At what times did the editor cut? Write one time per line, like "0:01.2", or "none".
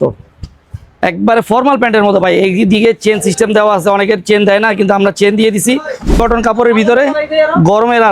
0:06.2